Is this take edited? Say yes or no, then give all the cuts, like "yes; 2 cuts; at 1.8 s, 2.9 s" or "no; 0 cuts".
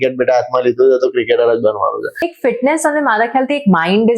yes; 1 cut; at 2.3 s